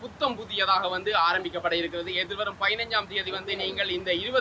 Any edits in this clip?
no; 0 cuts

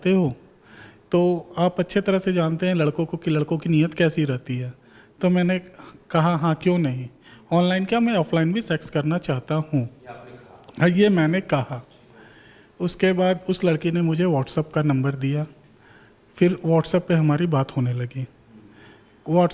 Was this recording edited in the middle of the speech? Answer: no; 0 cuts

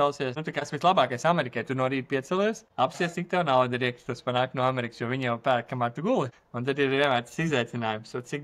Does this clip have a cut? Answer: no; 0 cuts

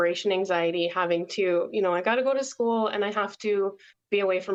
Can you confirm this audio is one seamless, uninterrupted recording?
yes; 0 cuts

